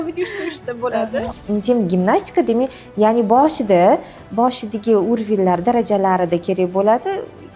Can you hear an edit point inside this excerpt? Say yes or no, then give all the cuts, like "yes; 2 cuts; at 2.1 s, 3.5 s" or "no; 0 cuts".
yes; 1 cut; at 1.3 s